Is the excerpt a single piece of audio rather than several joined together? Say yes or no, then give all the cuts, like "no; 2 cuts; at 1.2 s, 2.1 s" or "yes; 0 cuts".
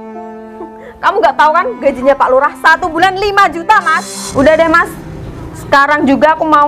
no; 1 cut; at 4.1 s